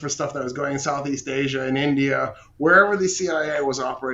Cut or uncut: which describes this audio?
uncut